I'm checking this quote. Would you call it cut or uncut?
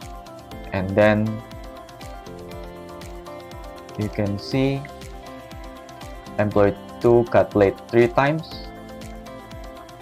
cut